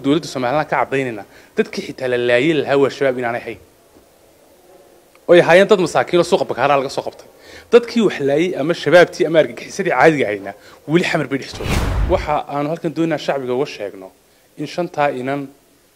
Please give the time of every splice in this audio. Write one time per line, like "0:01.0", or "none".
0:11.5